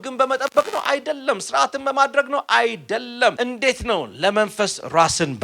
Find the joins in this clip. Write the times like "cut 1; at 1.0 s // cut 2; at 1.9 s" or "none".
cut 1; at 3.3 s

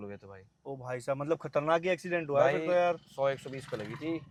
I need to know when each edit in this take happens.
none

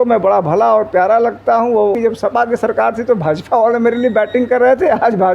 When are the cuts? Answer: cut 1; at 1.9 s

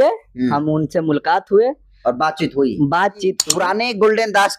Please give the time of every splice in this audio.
cut 1; at 3.4 s

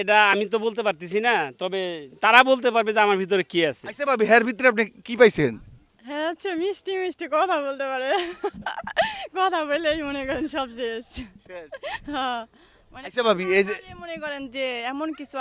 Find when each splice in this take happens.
none

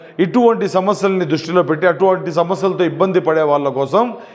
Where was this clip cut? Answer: none

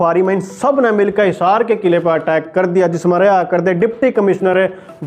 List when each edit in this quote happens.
none

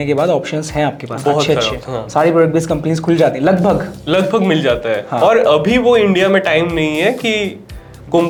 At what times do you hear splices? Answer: none

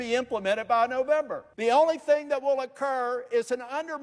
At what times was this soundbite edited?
cut 1; at 1.5 s

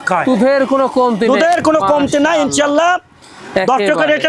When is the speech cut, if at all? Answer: none

